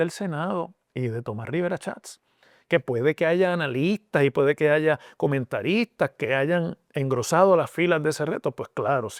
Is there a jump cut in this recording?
no; 0 cuts

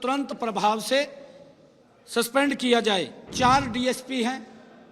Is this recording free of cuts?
no; 1 cut; at 3.2 s

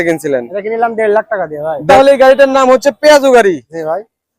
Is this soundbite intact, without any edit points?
no; 1 cut; at 1.8 s

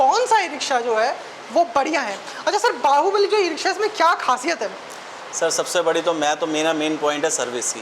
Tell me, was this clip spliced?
no; 0 cuts

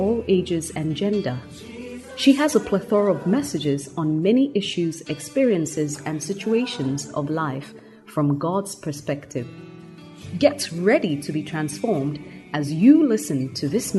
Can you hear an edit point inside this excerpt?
no; 0 cuts

